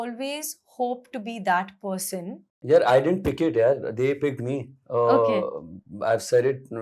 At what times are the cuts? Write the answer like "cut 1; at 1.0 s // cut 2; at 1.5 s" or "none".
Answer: cut 1; at 2.6 s